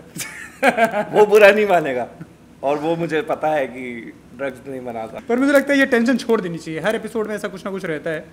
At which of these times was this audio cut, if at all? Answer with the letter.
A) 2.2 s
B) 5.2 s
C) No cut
B